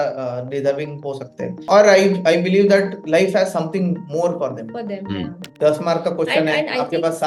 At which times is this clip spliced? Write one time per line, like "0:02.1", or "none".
0:01.6
0:05.4